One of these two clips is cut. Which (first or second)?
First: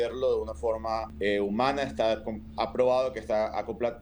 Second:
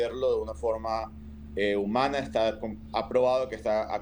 first